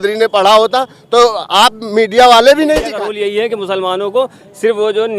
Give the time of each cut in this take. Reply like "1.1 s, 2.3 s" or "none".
3.1 s